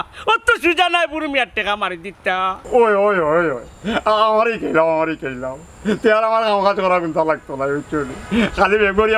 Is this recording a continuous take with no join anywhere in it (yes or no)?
no